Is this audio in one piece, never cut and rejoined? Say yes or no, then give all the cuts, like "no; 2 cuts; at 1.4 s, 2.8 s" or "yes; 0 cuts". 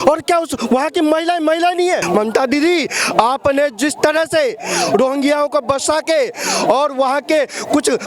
no; 1 cut; at 2.0 s